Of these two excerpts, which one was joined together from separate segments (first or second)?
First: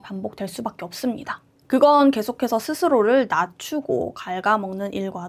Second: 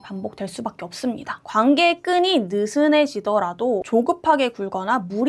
second